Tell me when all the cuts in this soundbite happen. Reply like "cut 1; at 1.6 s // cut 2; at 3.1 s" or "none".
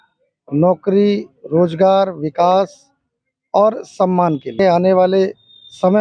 cut 1; at 4.6 s